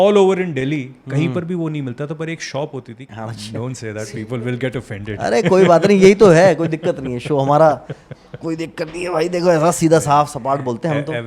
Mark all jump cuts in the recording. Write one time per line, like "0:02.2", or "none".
0:03.0